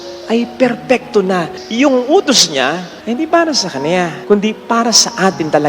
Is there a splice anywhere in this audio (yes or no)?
yes